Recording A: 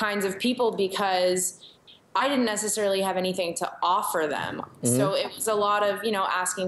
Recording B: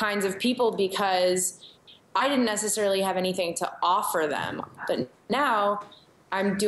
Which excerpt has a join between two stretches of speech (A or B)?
B